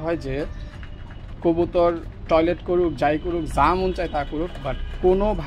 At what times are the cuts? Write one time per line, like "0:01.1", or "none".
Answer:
none